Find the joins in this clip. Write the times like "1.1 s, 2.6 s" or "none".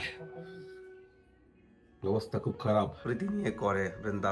3.0 s

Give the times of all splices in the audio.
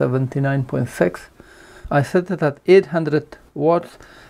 1.8 s

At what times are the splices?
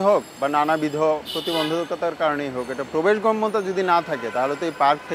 none

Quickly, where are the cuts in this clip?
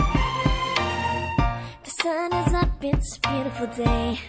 1.4 s

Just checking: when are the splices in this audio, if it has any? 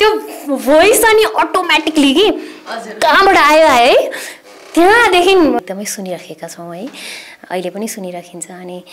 5.6 s

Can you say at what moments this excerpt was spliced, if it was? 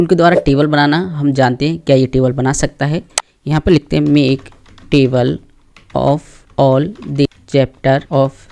none

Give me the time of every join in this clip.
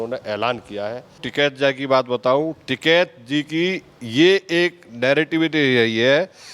1.2 s

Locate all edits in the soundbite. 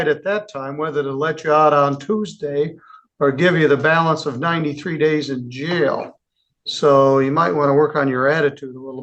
none

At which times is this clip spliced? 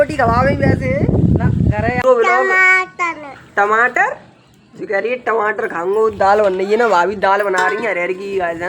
2.0 s, 7.8 s

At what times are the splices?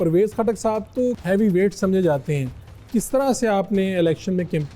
1.2 s

